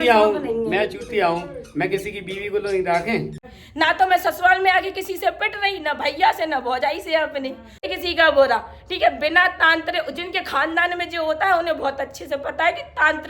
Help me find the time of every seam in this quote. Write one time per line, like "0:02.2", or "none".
0:03.4
0:07.9